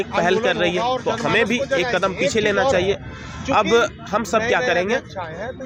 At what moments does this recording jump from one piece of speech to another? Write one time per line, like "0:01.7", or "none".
none